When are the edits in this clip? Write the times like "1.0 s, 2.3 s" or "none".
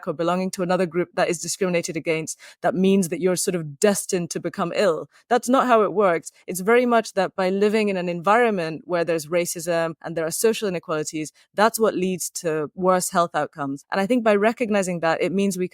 10.0 s, 13.8 s